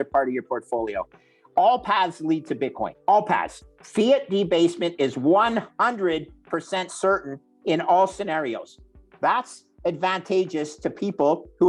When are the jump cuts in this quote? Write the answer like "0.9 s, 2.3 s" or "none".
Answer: none